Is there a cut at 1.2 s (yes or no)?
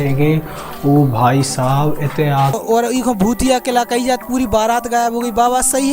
no